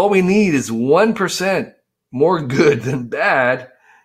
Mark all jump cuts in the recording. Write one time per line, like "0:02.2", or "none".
none